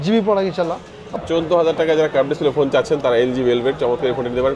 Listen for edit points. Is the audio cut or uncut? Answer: cut